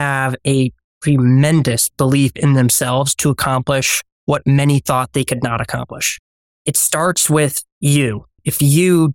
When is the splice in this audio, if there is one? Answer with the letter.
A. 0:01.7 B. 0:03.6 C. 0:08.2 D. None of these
C